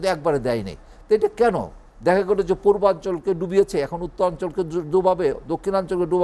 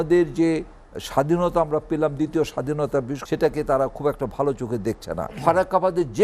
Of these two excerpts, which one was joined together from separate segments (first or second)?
second